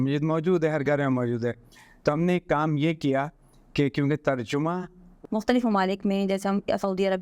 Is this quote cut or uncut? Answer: cut